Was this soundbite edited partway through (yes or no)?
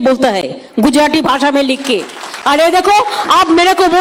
no